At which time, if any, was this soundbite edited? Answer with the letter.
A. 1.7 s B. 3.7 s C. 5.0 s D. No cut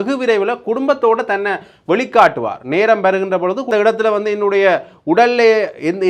B